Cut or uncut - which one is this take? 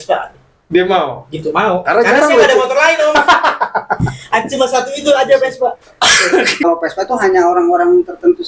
cut